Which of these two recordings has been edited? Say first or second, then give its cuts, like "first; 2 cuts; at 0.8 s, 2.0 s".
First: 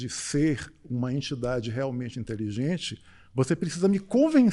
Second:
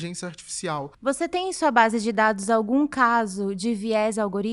second; 1 cut; at 0.9 s